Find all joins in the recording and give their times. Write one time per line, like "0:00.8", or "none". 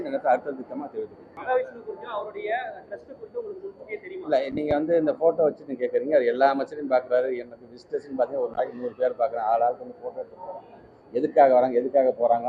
0:01.3